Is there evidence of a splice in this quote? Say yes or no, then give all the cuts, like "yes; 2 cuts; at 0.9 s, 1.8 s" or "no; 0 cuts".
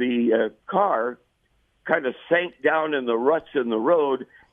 no; 0 cuts